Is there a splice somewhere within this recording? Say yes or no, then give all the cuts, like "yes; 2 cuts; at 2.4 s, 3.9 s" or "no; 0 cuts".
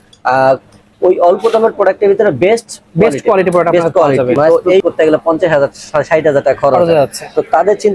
yes; 1 cut; at 4.8 s